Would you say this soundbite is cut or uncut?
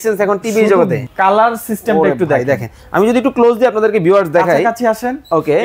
cut